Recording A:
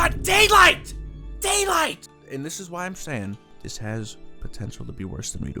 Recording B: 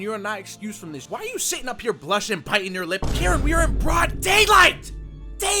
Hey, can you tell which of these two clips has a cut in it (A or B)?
B